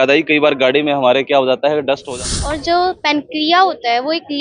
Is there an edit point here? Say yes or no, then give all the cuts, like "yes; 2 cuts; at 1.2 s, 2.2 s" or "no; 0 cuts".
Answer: yes; 1 cut; at 2.0 s